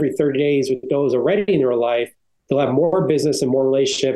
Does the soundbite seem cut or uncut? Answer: uncut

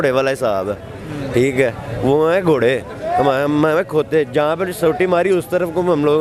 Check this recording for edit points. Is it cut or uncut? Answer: uncut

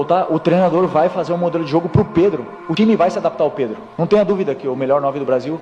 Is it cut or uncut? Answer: uncut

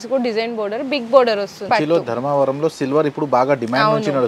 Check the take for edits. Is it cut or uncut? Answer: cut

